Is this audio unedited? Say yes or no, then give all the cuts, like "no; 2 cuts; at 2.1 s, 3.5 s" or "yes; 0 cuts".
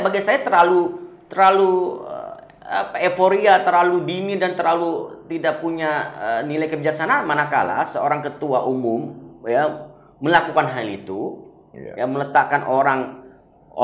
yes; 0 cuts